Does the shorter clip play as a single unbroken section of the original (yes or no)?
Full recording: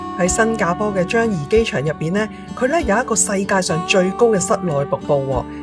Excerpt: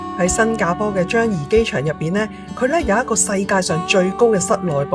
yes